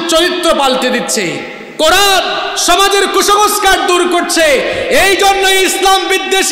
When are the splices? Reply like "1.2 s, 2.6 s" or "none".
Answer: none